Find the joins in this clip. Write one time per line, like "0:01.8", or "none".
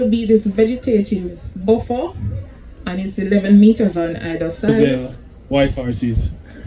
0:04.8